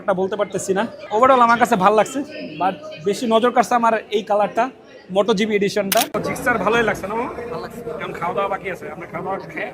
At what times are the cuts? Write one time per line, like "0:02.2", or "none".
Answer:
0:01.0
0:06.2